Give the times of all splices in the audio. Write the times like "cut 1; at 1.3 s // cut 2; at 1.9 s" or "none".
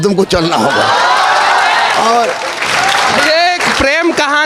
none